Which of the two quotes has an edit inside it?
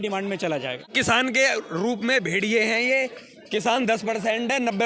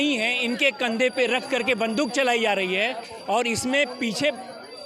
first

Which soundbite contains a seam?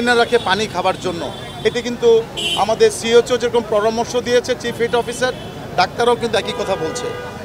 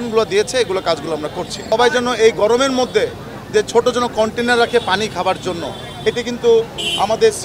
second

